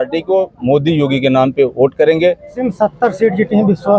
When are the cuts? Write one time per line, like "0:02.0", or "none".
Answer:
0:02.6

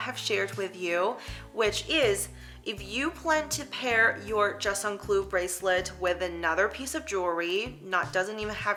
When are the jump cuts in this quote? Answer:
none

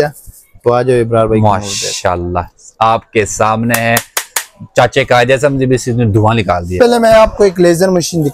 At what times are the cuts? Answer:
0:06.8

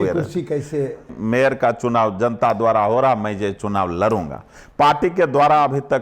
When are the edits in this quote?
0:01.1

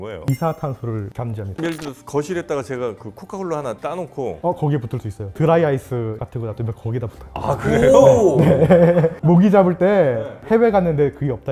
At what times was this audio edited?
0:01.6
0:09.1

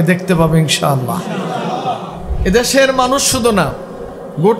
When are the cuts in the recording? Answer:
0:02.2

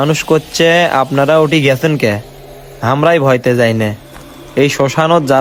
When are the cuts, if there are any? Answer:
none

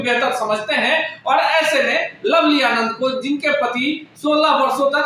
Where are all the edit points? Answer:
none

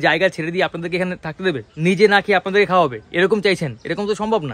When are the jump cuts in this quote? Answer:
0:01.7

